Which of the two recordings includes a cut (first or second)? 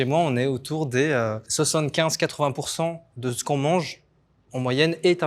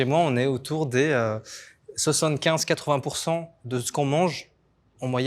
first